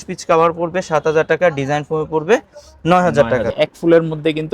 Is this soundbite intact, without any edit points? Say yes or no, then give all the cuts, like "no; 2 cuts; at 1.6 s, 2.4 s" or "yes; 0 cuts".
no; 1 cut; at 3.5 s